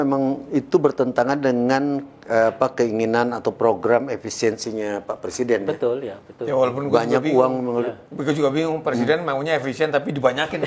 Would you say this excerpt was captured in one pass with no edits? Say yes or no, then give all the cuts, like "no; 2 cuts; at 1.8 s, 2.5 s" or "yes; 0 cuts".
yes; 0 cuts